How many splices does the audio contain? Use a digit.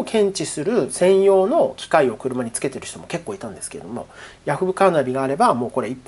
0